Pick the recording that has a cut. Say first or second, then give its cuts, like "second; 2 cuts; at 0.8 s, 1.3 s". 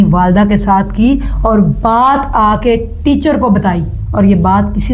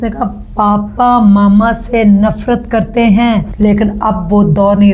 second; 1 cut; at 3.5 s